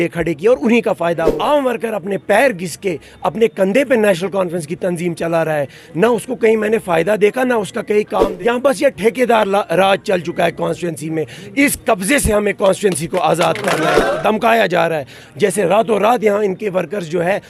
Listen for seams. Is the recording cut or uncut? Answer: cut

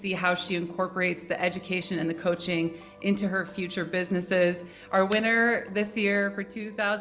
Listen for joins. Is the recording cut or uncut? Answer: uncut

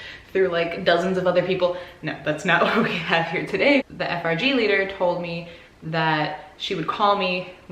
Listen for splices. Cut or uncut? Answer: cut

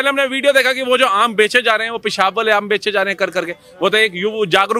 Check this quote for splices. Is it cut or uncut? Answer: uncut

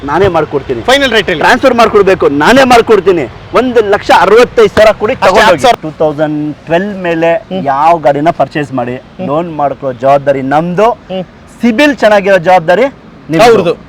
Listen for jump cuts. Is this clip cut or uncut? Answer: cut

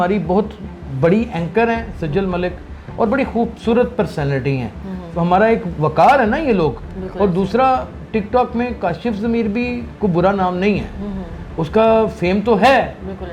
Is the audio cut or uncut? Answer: uncut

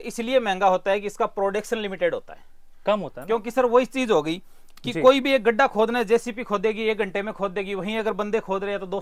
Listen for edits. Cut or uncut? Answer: uncut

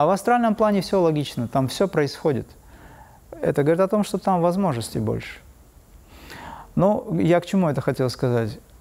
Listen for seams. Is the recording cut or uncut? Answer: uncut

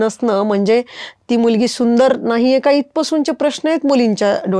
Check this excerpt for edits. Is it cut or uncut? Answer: uncut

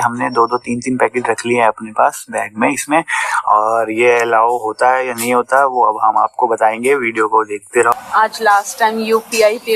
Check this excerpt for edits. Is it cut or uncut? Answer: cut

